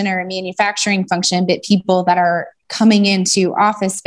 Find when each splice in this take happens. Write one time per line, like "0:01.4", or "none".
none